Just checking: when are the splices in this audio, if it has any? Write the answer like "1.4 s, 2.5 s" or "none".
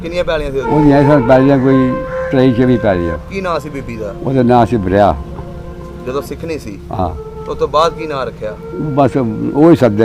none